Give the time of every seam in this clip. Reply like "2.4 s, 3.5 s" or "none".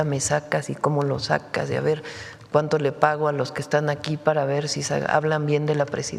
none